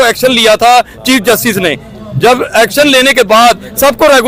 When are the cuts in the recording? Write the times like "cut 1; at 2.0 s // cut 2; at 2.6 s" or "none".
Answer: none

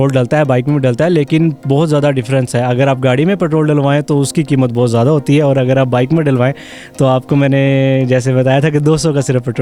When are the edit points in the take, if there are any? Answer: none

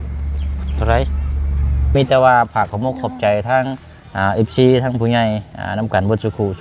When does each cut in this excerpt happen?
cut 1; at 1.9 s

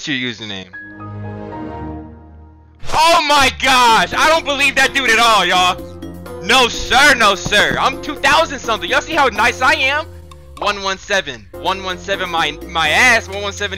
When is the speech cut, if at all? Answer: cut 1; at 11.4 s

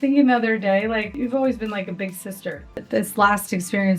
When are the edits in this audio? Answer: cut 1; at 1.1 s // cut 2; at 2.8 s

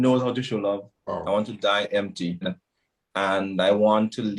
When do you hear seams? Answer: cut 1; at 0.9 s // cut 2; at 2.6 s

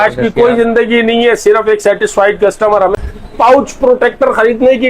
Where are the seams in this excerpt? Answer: cut 1; at 2.9 s

